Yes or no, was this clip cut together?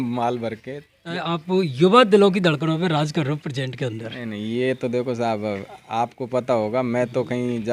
yes